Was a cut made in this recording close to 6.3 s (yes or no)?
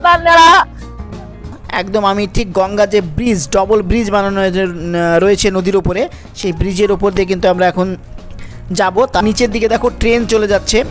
no